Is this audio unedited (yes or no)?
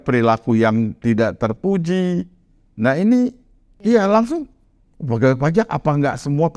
no